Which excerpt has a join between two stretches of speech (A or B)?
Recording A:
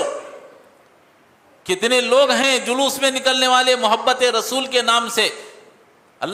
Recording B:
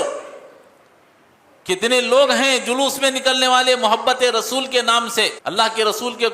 B